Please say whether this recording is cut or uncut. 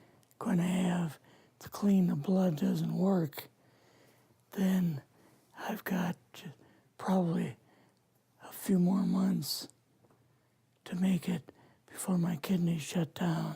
cut